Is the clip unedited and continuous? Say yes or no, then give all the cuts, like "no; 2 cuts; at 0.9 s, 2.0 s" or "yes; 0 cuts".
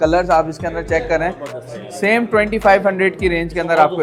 yes; 0 cuts